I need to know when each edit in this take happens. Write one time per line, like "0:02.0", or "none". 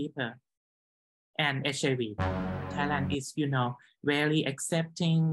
0:02.7